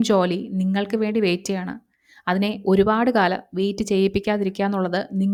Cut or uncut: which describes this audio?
uncut